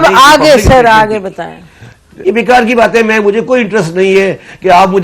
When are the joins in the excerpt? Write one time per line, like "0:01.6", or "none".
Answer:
0:02.1